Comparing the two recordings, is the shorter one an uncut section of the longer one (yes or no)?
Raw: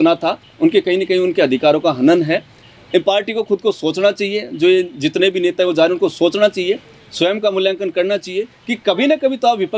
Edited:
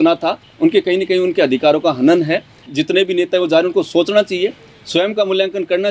no